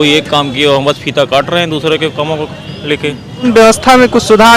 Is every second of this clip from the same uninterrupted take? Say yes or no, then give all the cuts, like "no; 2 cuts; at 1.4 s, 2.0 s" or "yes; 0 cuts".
no; 1 cut; at 3.4 s